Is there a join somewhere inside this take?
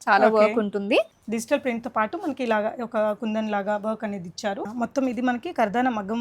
yes; 2 cuts; at 1.1 s, 4.7 s

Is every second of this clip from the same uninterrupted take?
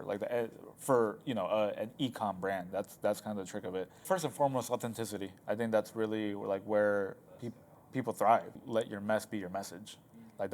no; 2 cuts; at 4.0 s, 8.6 s

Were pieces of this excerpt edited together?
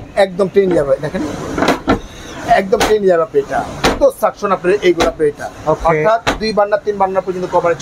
no; 0 cuts

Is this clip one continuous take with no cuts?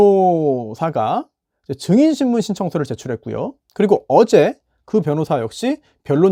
yes; 0 cuts

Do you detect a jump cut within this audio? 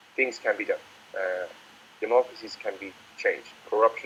no; 0 cuts

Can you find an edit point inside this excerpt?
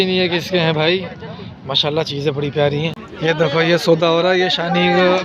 yes; 1 cut; at 3.1 s

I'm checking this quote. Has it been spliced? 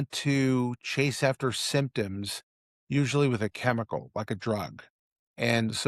no; 0 cuts

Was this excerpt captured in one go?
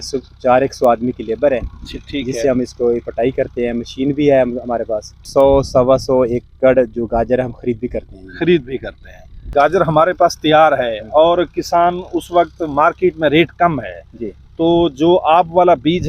no; 2 cuts; at 5.3 s, 9.5 s

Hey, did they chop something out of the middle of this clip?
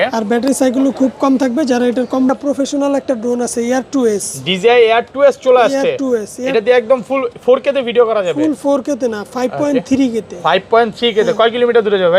yes; 1 cut; at 2.3 s

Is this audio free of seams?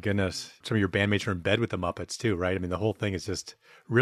yes; 0 cuts

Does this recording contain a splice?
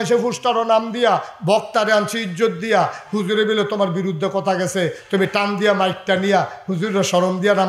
no; 0 cuts

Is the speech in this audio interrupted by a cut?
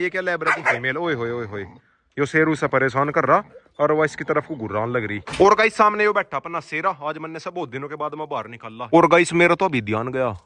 yes; 2 cuts; at 5.3 s, 8.9 s

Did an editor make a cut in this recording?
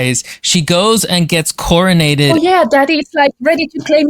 yes; 1 cut; at 2.3 s

